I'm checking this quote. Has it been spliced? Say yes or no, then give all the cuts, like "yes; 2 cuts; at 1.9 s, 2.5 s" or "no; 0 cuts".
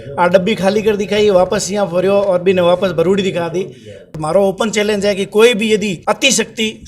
yes; 2 cuts; at 4.2 s, 6.0 s